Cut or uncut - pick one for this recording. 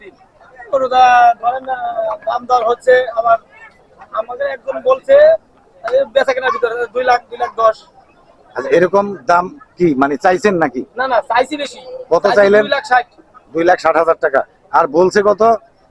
uncut